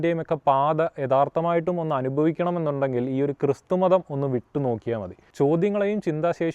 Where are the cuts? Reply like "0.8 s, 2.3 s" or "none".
5.2 s